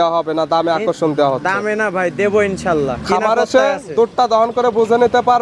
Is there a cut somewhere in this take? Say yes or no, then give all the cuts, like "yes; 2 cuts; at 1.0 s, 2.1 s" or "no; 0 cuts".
no; 0 cuts